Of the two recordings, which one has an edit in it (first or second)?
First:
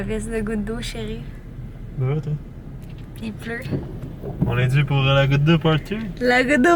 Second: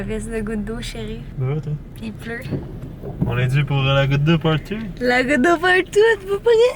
second